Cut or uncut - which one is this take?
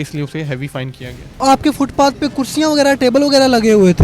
cut